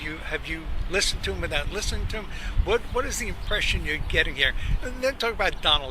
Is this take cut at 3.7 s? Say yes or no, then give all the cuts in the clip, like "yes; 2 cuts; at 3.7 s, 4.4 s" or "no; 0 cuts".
yes; 1 cut; at 3.7 s